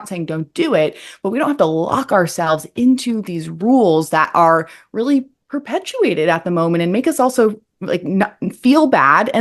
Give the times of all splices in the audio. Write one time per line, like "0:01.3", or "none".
none